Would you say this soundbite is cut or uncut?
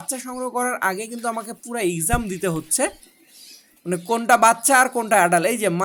uncut